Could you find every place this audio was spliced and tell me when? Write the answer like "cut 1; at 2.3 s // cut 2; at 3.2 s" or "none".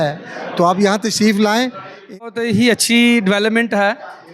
cut 1; at 2.2 s